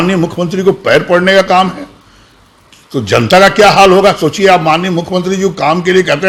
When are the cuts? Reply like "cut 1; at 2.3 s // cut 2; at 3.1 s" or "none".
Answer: none